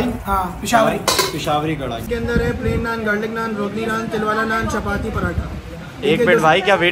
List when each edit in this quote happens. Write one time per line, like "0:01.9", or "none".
0:02.1
0:05.6